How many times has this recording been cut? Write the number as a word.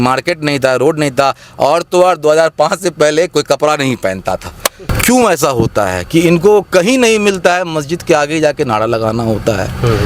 one